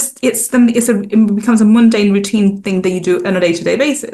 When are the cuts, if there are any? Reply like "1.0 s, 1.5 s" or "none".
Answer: none